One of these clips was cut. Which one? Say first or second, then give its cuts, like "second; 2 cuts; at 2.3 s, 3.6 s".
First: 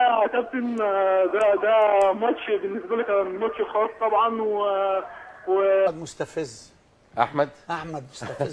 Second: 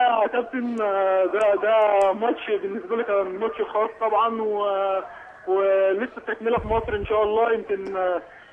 second; 1 cut; at 5.9 s